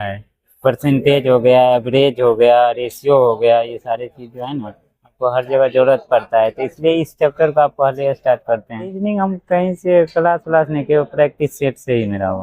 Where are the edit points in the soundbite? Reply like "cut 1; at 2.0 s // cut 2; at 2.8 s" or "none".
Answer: cut 1; at 9.0 s

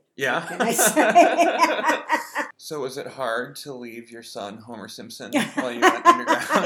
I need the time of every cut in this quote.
cut 1; at 2.5 s

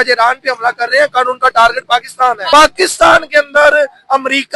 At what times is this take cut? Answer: cut 1; at 2.4 s

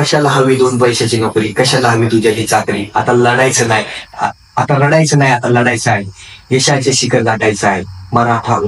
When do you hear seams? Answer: none

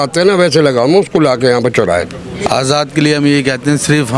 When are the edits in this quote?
cut 1; at 2.4 s

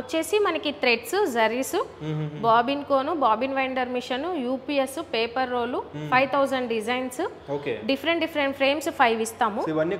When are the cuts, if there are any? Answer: none

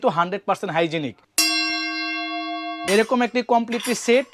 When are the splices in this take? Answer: cut 1; at 1.2 s // cut 2; at 2.8 s

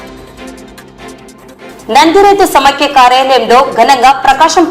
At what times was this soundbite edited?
cut 1; at 1.8 s

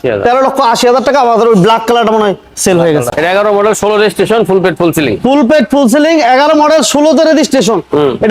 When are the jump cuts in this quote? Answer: cut 1; at 3.1 s

